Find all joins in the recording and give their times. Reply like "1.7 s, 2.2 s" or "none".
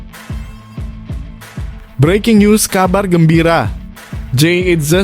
1.9 s